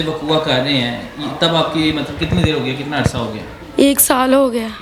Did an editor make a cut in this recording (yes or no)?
no